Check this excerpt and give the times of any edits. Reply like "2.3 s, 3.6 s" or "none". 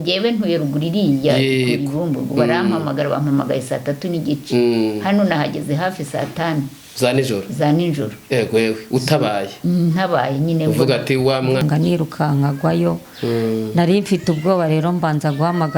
11.6 s

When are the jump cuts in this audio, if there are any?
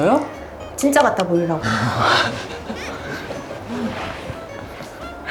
none

